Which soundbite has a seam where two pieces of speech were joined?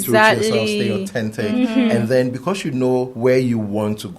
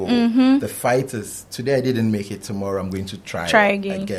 first; 1 cut; at 3.1 s

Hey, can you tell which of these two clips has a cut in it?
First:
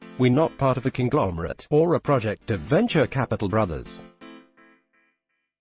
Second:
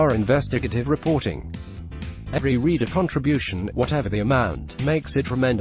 first; 1 cut; at 3.9 s

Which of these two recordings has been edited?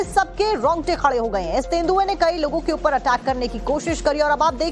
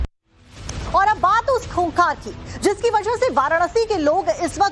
second; 1 cut; at 2.9 s

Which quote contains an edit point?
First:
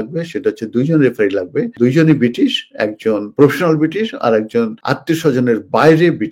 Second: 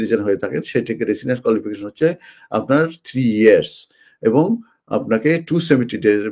first; 3 cuts; at 1.7 s, 3.3 s, 4.8 s

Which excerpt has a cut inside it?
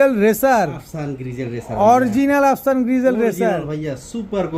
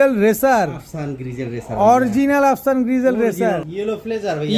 second; 1 cut; at 3.7 s

